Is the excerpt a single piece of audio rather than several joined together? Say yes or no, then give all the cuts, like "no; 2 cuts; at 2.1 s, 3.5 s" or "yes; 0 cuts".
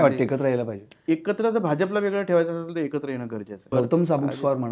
no; 2 cuts; at 1.0 s, 3.7 s